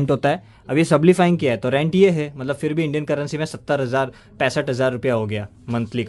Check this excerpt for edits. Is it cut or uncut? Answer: uncut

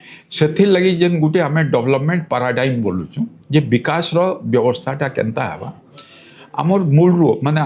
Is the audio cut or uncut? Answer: uncut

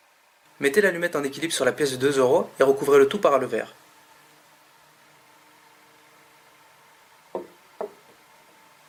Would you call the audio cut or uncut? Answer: uncut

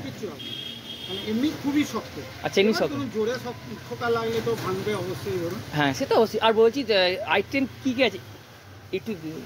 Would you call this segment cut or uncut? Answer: uncut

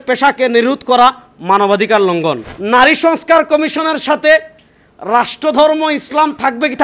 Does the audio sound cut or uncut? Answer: cut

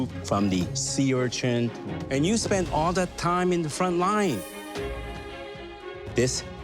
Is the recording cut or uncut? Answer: cut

